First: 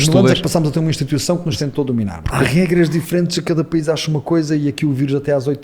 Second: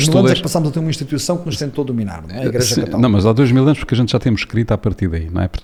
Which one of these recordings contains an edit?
first; 1 cut; at 2.2 s

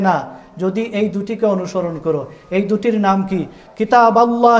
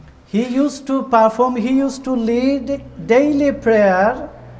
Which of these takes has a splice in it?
first; 1 cut; at 3.6 s

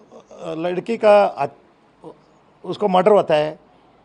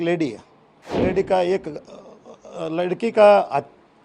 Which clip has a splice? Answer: second; 1 cut; at 1.0 s

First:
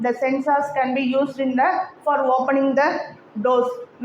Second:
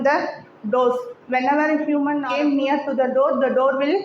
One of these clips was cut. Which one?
second; 1 cut; at 2.3 s

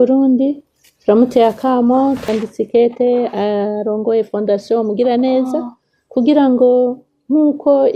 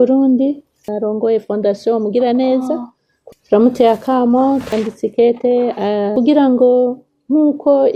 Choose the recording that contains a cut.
second; 3 cuts; at 0.9 s, 3.1 s, 6.1 s

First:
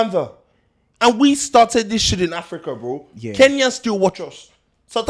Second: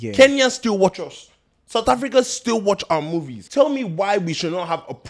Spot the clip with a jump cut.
second; 1 cut; at 3.4 s

